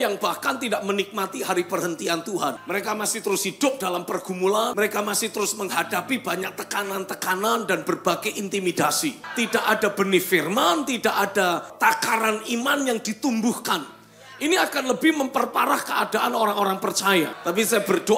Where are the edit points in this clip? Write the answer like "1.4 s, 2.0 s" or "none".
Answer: 2.6 s, 4.7 s, 9.2 s, 11.7 s, 17.4 s